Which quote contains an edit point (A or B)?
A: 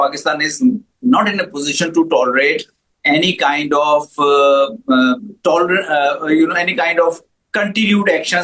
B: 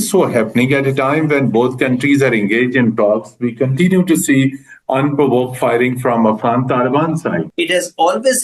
B